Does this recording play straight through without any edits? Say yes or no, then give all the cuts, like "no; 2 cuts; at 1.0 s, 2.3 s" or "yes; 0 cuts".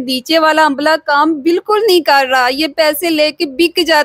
yes; 0 cuts